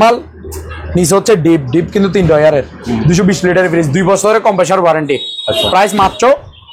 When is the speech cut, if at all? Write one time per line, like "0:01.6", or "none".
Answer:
none